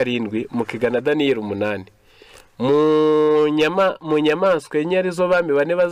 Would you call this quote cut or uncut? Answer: uncut